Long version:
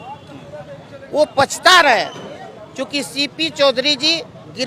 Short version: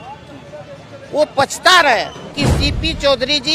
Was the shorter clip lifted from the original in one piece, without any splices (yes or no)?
no